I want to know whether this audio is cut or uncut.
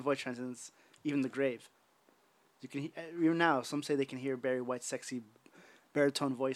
uncut